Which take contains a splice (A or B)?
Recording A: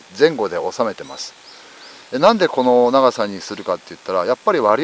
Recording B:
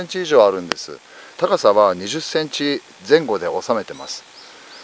B